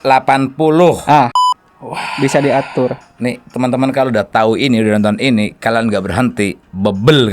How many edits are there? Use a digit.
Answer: 1